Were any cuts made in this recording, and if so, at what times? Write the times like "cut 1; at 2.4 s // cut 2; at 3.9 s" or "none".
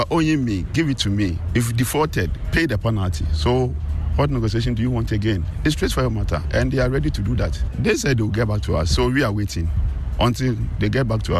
cut 1; at 1.4 s // cut 2; at 5.5 s // cut 3; at 7.6 s